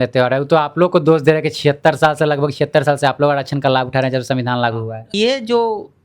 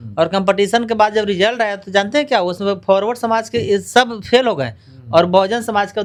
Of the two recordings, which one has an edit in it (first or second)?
first